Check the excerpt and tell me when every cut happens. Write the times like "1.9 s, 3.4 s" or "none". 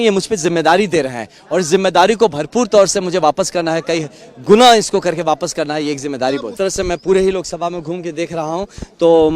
6.5 s